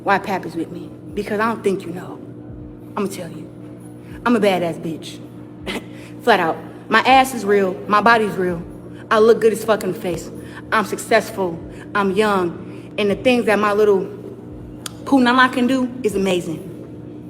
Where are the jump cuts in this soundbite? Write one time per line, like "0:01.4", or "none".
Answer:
0:07.9